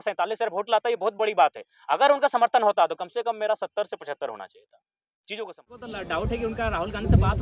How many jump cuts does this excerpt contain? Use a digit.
1